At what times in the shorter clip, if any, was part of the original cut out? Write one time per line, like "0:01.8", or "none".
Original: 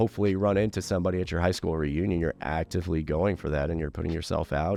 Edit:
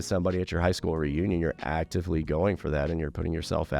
none